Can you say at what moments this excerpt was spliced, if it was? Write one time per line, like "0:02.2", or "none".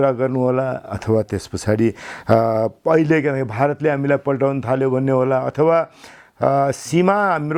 none